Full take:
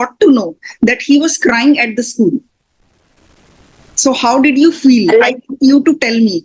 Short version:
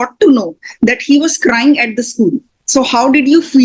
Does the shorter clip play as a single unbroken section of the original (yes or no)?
no